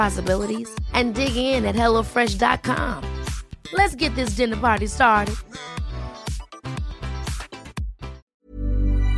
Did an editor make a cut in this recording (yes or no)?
yes